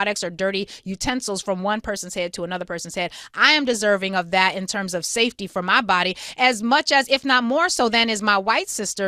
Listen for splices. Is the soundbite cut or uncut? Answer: uncut